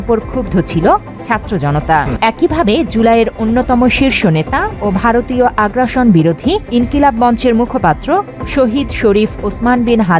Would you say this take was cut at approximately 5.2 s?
no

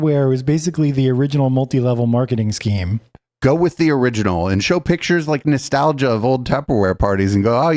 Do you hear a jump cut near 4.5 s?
no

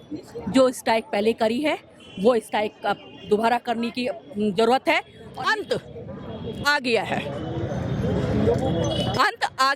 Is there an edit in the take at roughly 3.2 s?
no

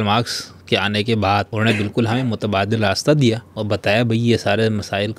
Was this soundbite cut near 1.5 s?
yes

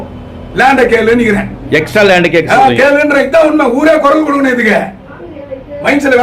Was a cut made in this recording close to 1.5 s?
yes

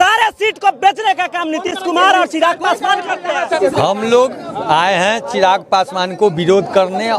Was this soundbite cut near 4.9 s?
no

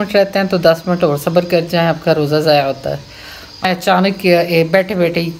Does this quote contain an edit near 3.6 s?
yes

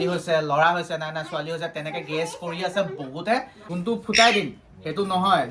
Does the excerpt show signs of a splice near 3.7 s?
yes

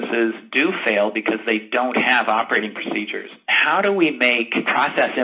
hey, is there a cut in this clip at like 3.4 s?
yes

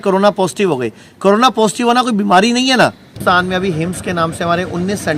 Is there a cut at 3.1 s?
yes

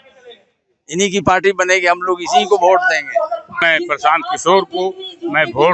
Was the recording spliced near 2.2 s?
no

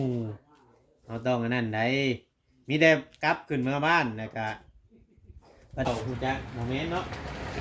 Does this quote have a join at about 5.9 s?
yes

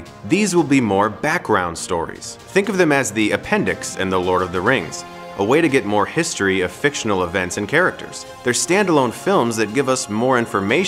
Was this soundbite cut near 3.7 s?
no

